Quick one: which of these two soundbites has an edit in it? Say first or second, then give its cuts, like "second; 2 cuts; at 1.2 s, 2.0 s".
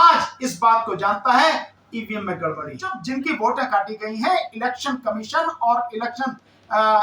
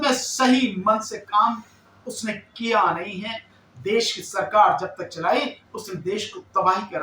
first; 1 cut; at 2.9 s